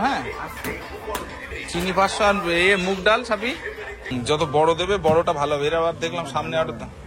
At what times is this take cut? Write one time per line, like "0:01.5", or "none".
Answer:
0:01.5
0:03.9

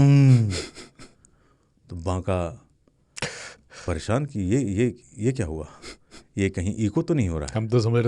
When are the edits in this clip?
none

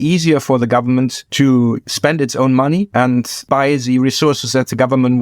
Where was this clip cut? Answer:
0:01.2
0:01.9
0:03.1

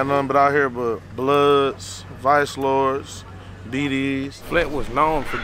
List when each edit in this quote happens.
0:01.1
0:04.4

